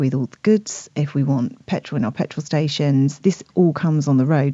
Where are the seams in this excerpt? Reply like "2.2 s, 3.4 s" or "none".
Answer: 3.2 s